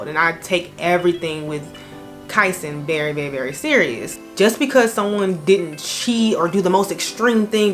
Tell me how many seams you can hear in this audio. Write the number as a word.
one